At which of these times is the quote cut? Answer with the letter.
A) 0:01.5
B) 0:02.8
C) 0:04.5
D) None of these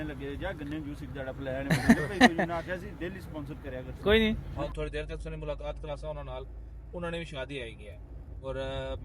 C